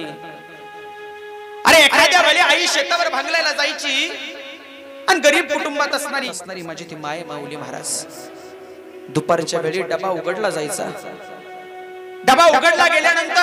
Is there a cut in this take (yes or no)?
yes